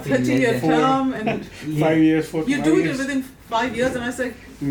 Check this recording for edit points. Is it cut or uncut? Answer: uncut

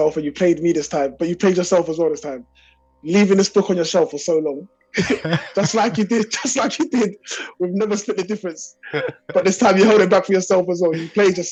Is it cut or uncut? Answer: uncut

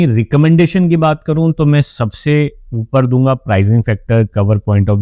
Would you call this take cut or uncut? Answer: uncut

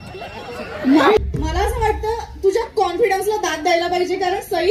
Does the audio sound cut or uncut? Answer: cut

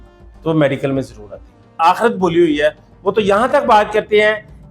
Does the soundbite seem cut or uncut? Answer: cut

